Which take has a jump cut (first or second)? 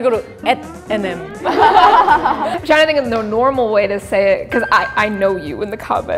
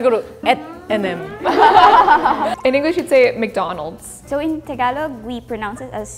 first